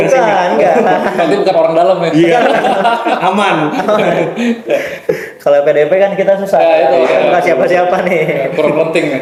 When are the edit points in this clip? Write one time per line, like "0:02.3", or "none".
none

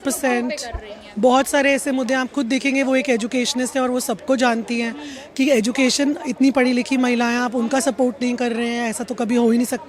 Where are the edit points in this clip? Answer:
none

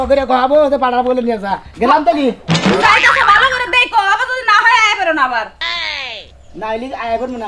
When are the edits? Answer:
none

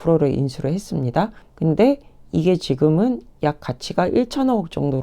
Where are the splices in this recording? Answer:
0:01.4

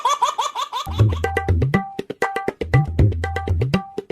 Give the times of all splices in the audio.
none

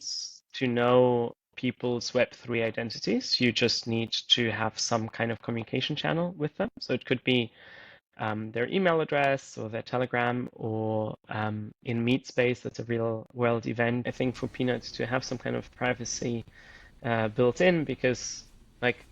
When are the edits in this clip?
0:14.1

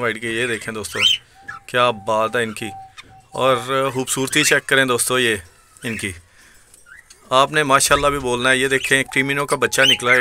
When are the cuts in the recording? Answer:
none

